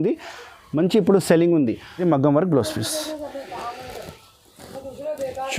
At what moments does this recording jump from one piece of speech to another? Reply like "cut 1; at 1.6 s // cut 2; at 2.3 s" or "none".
cut 1; at 1.9 s